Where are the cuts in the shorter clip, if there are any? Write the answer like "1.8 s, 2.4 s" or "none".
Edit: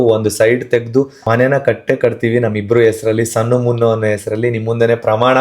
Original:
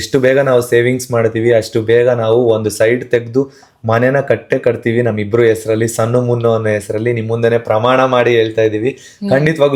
1.2 s